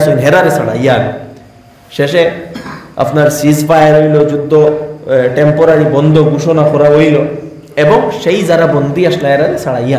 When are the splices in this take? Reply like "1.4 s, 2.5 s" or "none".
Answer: none